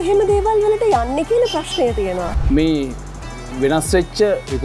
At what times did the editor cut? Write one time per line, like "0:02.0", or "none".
0:02.4